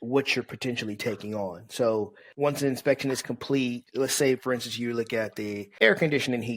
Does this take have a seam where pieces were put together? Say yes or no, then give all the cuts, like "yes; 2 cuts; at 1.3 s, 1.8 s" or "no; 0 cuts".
yes; 3 cuts; at 2.2 s, 3.8 s, 5.6 s